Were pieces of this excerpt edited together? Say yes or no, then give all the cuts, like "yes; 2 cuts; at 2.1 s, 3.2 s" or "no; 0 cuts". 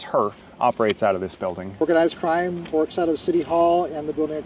yes; 1 cut; at 1.8 s